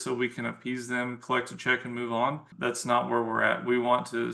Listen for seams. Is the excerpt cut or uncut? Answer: cut